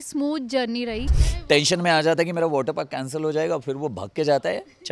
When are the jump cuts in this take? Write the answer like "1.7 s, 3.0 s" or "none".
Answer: 1.3 s